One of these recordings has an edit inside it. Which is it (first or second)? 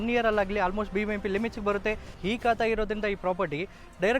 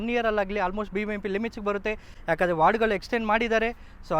first